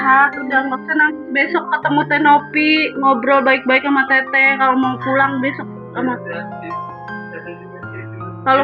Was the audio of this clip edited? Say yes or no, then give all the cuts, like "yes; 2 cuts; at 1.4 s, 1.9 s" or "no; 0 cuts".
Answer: no; 0 cuts